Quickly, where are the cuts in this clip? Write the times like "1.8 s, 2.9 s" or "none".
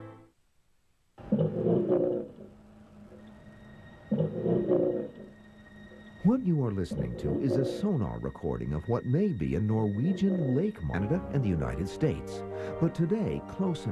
none